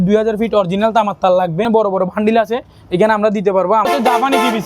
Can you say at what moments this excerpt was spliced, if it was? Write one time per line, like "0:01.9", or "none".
0:01.7
0:03.9